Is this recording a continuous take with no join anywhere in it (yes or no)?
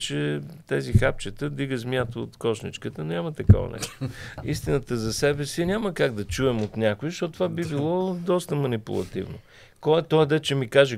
no